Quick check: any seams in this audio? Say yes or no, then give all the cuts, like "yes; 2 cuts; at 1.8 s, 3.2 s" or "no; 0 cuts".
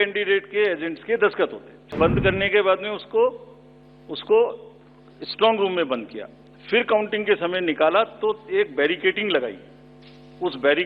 yes; 1 cut; at 1.9 s